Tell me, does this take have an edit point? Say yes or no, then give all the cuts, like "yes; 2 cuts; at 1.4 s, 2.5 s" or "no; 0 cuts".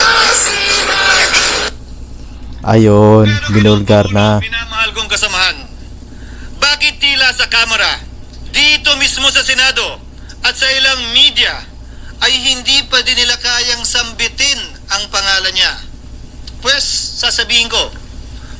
no; 0 cuts